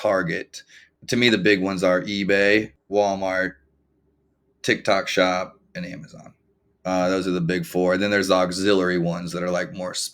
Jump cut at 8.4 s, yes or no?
no